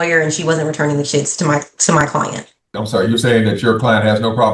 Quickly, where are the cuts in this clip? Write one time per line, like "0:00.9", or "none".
0:02.7